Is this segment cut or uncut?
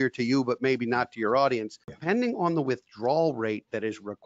cut